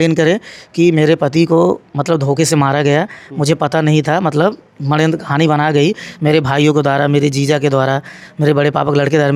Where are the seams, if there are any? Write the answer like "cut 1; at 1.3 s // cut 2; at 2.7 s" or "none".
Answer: none